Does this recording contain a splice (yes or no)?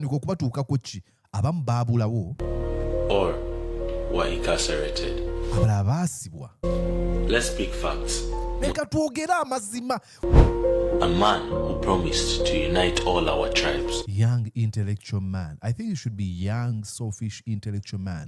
yes